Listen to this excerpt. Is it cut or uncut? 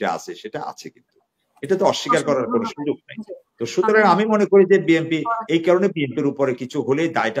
uncut